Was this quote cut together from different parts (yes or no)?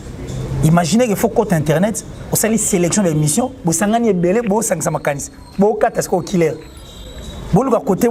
no